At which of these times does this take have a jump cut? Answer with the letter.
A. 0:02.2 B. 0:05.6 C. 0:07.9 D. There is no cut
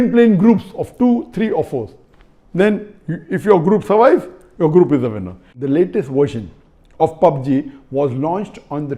B